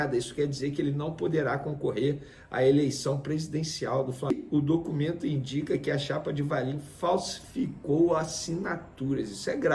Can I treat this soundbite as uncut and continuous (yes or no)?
no